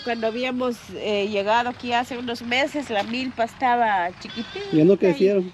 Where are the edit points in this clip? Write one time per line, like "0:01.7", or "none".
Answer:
none